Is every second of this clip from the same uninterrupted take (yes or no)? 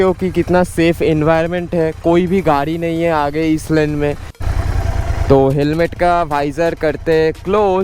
no